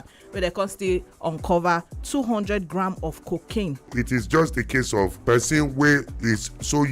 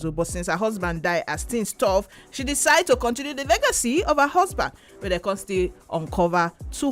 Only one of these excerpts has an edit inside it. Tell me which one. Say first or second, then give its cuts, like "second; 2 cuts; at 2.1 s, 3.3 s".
first; 2 cuts; at 3.9 s, 5.2 s